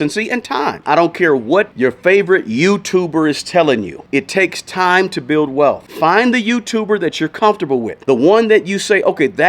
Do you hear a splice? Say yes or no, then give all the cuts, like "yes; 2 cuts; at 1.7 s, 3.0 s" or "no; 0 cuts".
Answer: yes; 4 cuts; at 0.8 s, 1.7 s, 5.9 s, 7.9 s